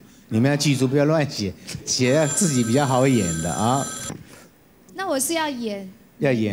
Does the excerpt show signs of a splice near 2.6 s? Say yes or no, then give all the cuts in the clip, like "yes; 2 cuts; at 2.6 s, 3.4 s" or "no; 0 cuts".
no; 1 cut; at 4.3 s